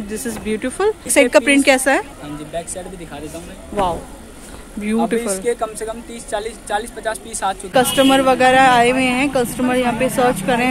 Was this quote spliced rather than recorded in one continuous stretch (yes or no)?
yes